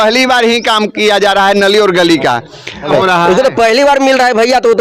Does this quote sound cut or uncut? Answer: cut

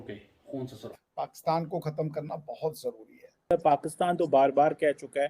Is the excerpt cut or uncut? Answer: cut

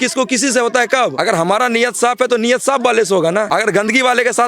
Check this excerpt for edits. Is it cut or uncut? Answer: cut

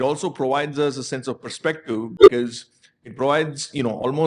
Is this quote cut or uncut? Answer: uncut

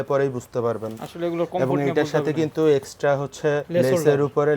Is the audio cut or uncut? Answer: uncut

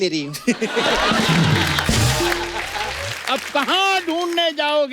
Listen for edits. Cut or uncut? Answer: cut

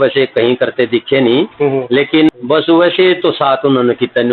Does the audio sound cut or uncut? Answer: cut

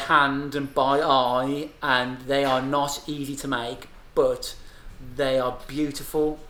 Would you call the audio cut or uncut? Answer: uncut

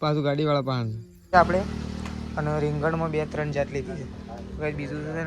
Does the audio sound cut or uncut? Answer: cut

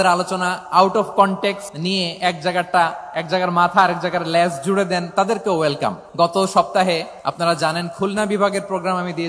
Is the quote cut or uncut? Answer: cut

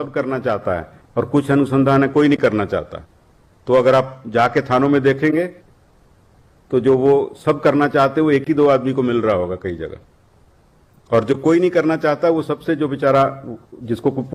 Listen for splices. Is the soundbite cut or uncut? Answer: uncut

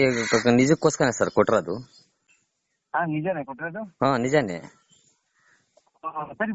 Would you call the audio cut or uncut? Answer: uncut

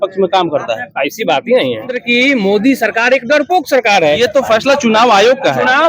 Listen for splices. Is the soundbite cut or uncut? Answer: cut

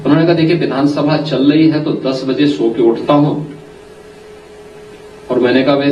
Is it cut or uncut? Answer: cut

